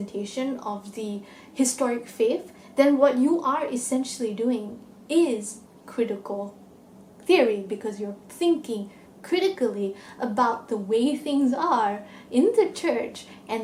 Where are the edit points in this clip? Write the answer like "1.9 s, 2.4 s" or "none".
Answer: none